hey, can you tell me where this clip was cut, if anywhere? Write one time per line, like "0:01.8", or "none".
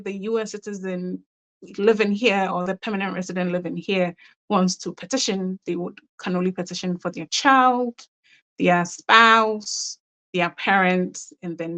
none